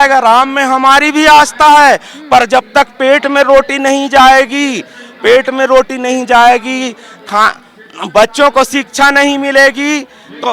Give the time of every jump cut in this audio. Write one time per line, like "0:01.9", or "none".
none